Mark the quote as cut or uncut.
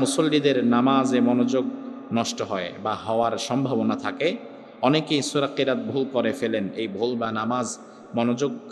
uncut